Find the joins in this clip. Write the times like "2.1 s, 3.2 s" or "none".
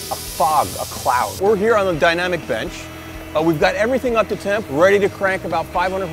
1.4 s, 4.6 s